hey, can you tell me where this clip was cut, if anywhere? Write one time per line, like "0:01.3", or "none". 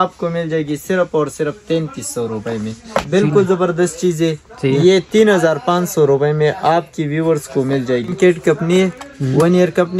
0:03.0
0:08.1